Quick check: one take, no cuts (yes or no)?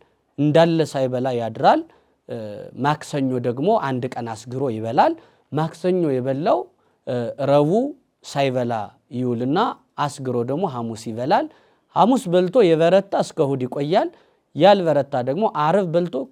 yes